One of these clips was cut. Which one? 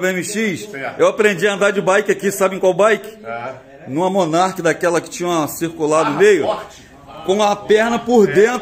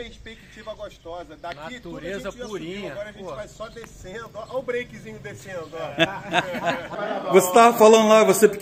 second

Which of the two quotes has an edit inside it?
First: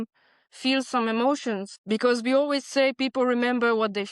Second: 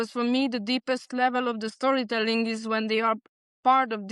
first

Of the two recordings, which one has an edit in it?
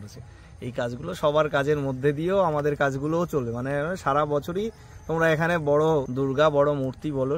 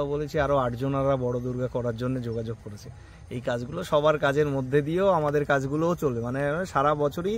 first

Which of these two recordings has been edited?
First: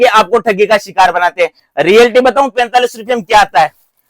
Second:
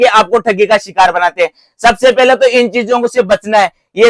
first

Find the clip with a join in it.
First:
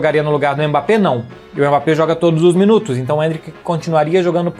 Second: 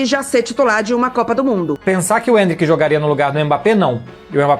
second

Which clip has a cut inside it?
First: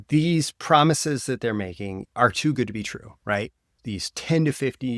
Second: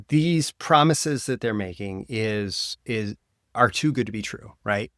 first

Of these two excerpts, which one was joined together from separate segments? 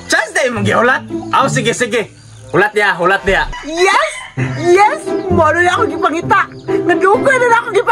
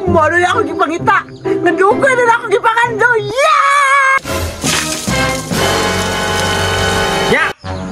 first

